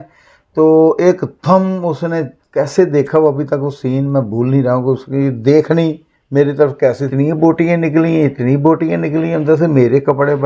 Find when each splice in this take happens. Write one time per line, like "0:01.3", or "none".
0:02.4
0:07.1